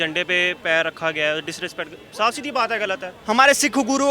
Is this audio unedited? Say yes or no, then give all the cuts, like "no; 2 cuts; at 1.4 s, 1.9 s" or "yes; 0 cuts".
no; 1 cut; at 3.1 s